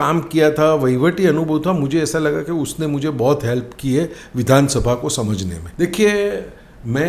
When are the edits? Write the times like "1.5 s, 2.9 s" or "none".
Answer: 5.6 s